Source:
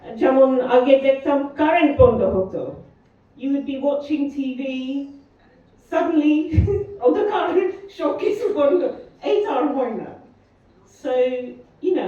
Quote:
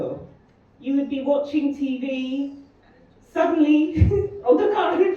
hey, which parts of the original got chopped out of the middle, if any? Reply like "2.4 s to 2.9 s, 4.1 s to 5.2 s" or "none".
none